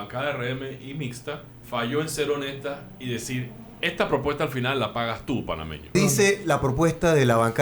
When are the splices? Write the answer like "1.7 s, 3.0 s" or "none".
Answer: 1.5 s, 5.9 s